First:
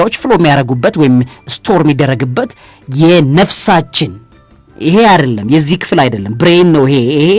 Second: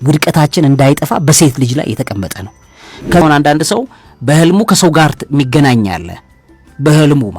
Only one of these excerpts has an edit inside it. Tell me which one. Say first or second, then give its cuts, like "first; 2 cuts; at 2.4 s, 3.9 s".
second; 1 cut; at 3.2 s